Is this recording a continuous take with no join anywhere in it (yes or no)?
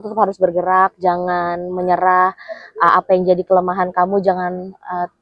yes